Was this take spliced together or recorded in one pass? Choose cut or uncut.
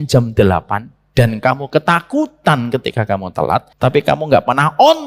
cut